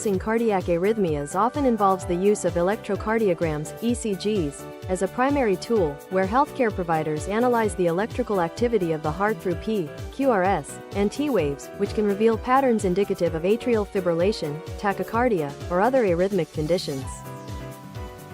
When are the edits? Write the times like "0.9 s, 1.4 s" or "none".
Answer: 17.0 s